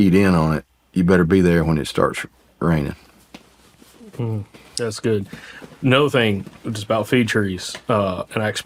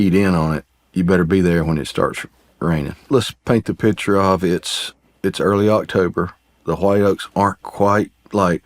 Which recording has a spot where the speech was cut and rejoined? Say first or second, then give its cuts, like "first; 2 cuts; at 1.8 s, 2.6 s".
second; 1 cut; at 3.0 s